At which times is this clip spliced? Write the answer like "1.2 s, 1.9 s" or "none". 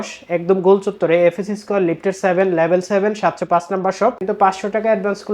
4.2 s